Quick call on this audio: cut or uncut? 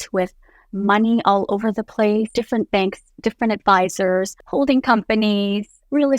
cut